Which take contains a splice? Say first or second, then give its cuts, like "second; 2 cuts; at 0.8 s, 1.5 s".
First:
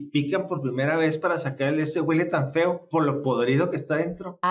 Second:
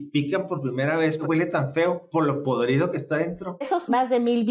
second; 2 cuts; at 1.2 s, 3.6 s